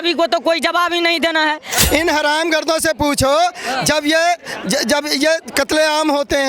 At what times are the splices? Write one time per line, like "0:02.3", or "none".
0:01.8